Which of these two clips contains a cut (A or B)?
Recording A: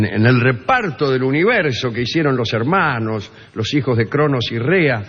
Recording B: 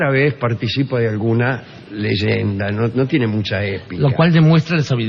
A